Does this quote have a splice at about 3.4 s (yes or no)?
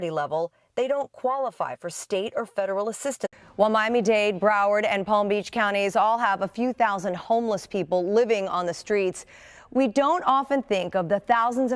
no